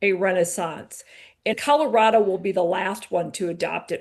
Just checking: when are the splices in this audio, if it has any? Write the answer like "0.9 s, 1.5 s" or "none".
1.5 s